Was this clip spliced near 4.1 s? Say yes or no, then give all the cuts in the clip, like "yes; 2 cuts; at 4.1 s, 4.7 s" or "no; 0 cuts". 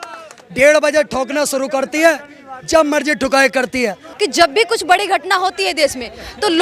yes; 1 cut; at 4.1 s